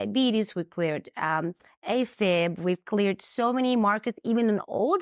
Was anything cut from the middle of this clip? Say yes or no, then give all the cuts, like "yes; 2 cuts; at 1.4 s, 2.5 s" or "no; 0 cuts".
no; 0 cuts